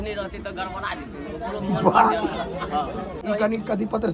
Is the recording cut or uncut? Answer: cut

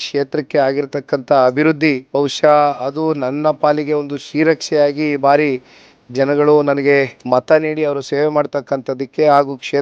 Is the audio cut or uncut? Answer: cut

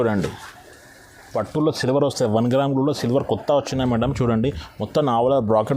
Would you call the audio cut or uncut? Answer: cut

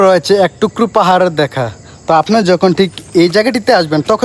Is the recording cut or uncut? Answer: uncut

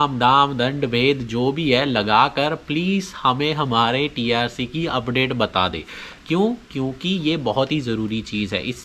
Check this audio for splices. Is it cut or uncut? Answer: uncut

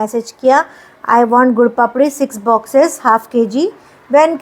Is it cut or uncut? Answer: uncut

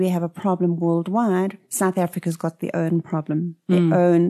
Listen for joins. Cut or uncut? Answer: uncut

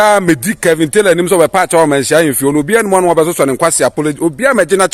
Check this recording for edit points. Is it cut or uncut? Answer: uncut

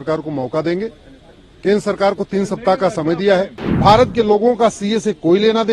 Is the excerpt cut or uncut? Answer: cut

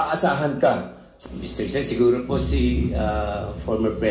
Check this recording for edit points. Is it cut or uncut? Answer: cut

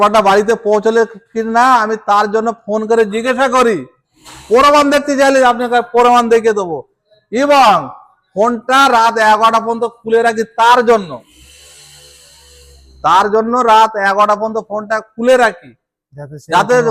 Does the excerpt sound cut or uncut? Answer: uncut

